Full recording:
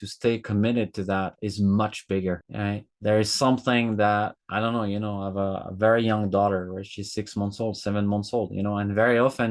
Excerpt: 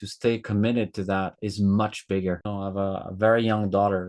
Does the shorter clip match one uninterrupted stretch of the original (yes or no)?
no